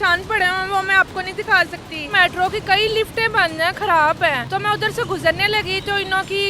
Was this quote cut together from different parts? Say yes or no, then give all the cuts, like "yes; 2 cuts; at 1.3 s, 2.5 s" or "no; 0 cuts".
yes; 2 cuts; at 2.1 s, 4.4 s